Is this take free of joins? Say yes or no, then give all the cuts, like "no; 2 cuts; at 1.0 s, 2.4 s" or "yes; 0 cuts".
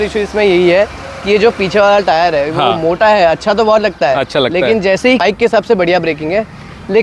no; 1 cut; at 5.2 s